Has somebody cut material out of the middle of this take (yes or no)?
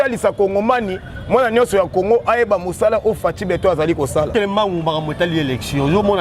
yes